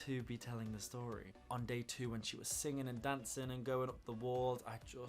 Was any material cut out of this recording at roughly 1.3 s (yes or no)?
yes